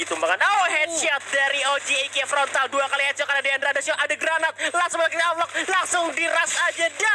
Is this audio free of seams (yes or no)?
yes